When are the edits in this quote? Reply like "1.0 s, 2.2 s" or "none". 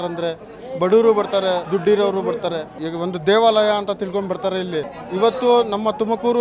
1.6 s, 2.8 s, 5.0 s